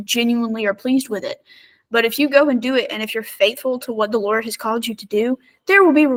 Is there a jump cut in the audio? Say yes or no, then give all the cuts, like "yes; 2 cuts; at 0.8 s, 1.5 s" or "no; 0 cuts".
no; 0 cuts